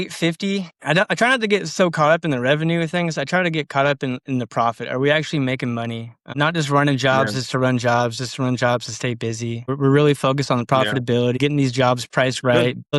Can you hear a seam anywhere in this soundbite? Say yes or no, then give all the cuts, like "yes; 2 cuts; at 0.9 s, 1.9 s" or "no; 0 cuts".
no; 0 cuts